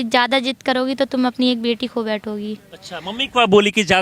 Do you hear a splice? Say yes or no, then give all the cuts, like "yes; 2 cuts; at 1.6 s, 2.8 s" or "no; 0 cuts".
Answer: no; 0 cuts